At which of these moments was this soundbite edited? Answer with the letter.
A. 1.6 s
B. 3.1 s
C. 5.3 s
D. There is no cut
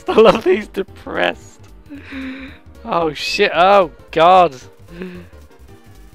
C